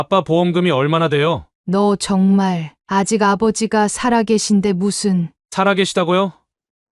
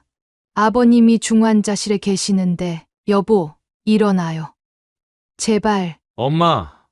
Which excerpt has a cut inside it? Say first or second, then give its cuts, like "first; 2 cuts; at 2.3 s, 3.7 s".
second; 2 cuts; at 2.9 s, 6.0 s